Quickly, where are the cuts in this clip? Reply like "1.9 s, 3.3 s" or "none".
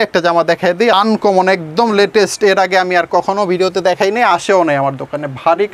0.9 s